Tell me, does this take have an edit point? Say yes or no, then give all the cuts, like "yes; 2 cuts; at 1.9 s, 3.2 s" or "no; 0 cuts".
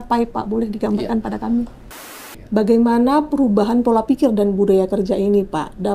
yes; 1 cut; at 2.1 s